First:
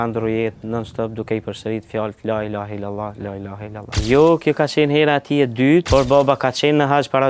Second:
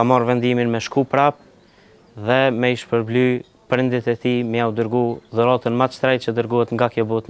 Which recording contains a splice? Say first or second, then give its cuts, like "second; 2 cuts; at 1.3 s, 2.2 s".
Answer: first; 2 cuts; at 4.0 s, 5.9 s